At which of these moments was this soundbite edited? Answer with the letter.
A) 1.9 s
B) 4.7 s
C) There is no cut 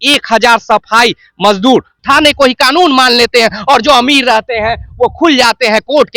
A